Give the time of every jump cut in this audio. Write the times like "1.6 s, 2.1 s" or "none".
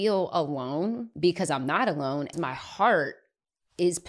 1.1 s, 2.3 s